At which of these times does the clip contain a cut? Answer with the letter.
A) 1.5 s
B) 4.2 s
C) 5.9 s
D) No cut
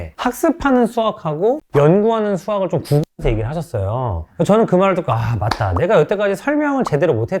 D